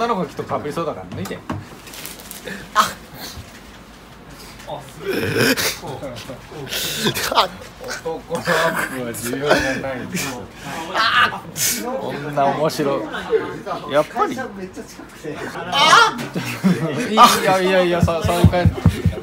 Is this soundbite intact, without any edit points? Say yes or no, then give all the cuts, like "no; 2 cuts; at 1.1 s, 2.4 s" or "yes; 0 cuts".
no; 2 cuts; at 1.9 s, 15.6 s